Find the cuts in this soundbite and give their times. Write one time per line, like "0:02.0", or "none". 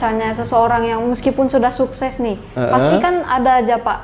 none